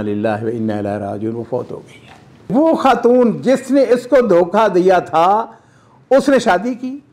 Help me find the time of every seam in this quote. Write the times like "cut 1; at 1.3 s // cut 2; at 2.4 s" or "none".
cut 1; at 2.5 s